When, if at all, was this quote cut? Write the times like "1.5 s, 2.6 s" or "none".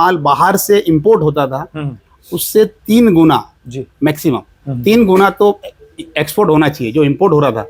none